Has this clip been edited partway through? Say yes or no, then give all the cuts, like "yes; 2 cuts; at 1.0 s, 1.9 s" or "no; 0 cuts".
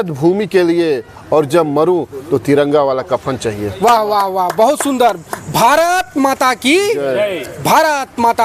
no; 0 cuts